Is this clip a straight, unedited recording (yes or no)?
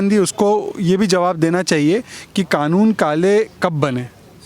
yes